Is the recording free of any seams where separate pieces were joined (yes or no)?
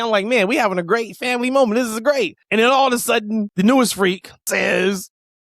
no